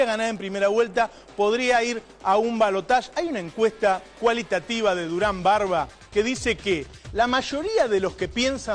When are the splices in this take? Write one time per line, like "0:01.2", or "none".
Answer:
0:02.8